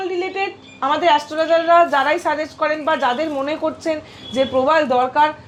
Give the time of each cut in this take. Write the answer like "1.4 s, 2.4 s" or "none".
none